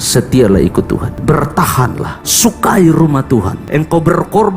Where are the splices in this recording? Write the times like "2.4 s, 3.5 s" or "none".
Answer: 1.1 s, 2.2 s, 3.6 s